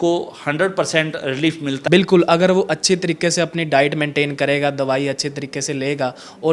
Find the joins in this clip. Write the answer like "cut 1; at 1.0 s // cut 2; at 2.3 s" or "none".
cut 1; at 1.8 s

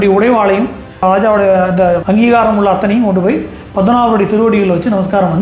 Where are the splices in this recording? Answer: cut 1; at 1.0 s // cut 2; at 2.0 s

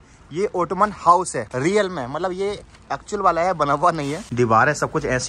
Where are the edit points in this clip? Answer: cut 1; at 1.4 s // cut 2; at 4.2 s

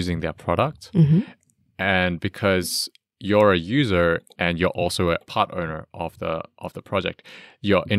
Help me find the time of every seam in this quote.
none

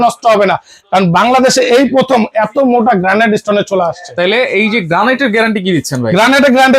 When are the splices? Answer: none

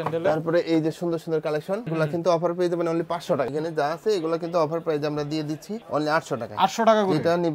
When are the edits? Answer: cut 1; at 1.9 s // cut 2; at 3.5 s

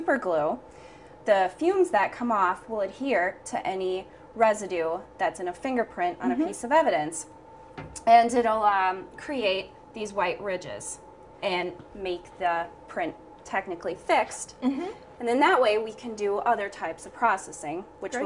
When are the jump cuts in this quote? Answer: cut 1; at 2.6 s

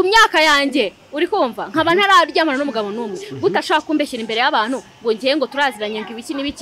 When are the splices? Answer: none

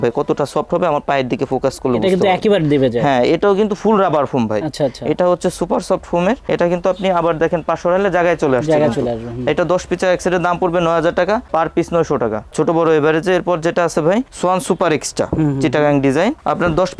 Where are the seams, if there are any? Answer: none

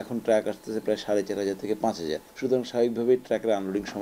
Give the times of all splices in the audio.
cut 1; at 2.3 s

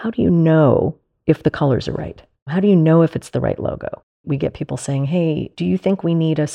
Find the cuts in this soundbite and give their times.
cut 1; at 1.1 s // cut 2; at 2.5 s // cut 3; at 4.2 s

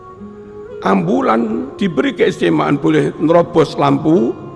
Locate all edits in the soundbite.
cut 1; at 1.7 s

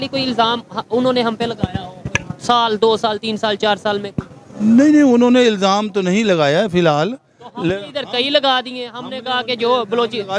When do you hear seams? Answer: none

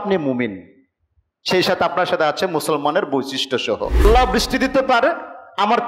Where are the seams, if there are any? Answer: cut 1; at 4.0 s

